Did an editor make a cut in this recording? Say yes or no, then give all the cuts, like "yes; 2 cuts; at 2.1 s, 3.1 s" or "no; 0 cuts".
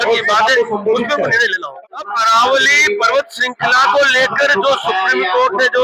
yes; 1 cut; at 1.6 s